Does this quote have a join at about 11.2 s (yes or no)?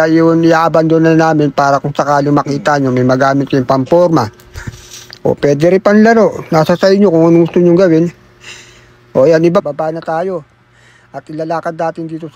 no